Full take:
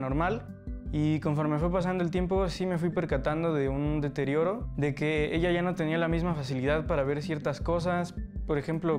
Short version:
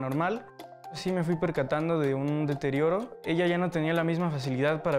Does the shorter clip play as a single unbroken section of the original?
no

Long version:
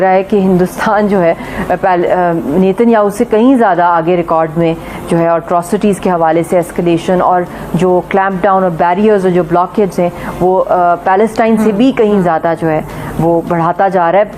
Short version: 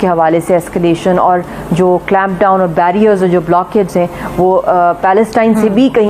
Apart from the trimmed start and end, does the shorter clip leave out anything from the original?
no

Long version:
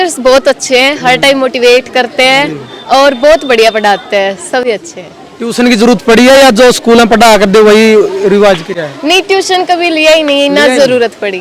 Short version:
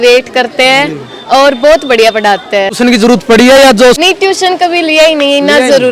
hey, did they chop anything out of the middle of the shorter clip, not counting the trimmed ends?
yes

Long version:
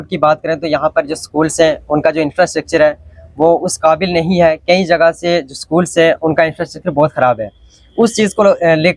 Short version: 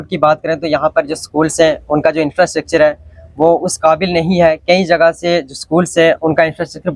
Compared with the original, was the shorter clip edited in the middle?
no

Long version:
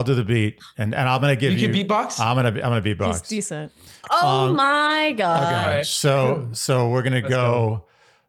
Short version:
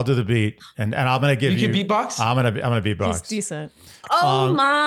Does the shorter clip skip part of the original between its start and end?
no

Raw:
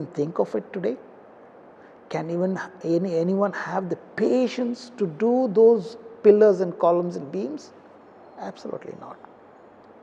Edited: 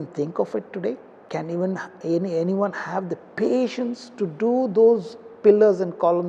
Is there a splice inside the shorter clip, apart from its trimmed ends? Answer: yes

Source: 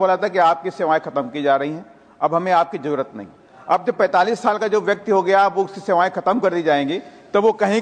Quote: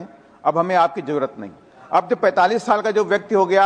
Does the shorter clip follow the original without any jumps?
yes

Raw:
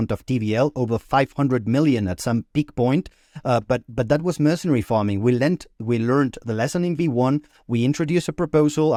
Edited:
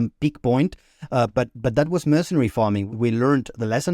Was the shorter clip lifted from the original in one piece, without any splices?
no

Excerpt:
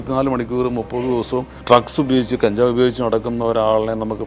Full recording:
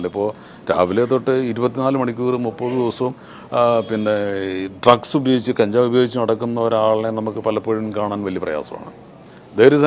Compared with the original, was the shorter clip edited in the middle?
yes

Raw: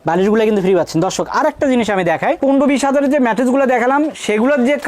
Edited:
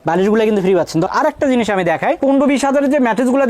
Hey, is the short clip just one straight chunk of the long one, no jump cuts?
no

